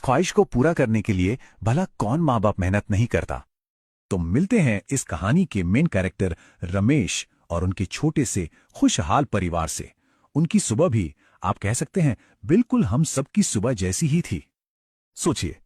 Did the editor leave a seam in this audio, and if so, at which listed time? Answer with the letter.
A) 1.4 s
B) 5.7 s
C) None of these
B